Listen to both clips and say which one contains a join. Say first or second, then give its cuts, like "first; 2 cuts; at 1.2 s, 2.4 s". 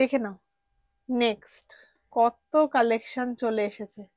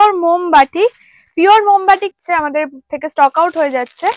second; 1 cut; at 2.1 s